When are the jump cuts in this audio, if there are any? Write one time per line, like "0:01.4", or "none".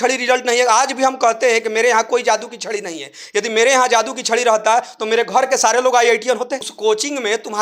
0:06.7